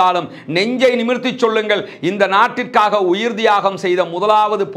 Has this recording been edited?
no; 0 cuts

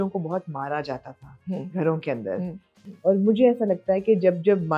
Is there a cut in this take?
yes; 1 cut; at 2.7 s

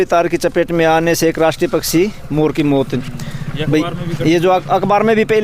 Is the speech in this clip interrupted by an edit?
no; 0 cuts

